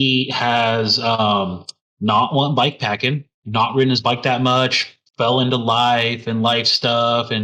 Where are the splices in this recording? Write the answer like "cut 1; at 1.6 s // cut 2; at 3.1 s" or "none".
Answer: none